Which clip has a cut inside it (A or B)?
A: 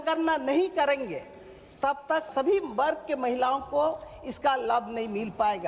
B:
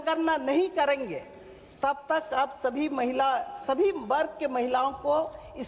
A